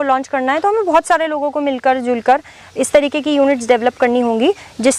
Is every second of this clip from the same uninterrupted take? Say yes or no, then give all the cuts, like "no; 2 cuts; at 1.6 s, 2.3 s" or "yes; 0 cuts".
yes; 0 cuts